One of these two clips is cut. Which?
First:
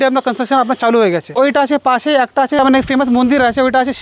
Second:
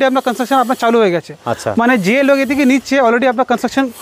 first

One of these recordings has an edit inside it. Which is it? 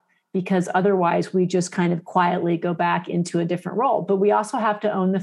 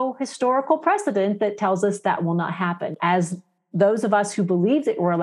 second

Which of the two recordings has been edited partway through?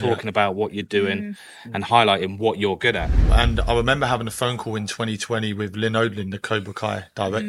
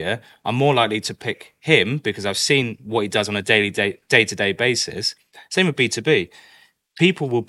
first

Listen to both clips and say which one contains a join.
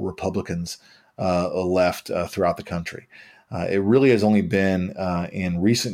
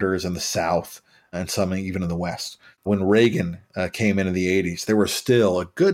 second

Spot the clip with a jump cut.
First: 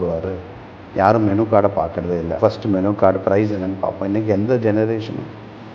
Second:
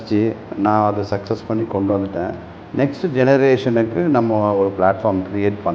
first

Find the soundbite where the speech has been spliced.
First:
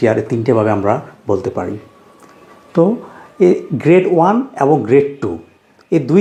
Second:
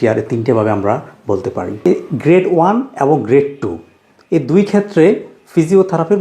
second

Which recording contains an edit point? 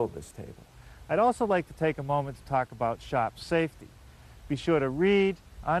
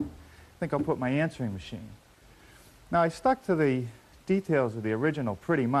second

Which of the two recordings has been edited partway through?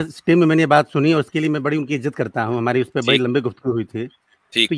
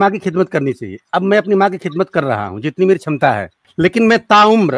second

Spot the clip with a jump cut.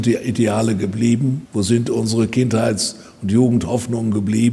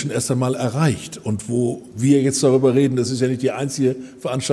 first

